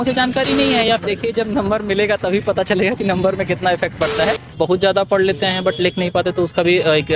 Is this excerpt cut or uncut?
cut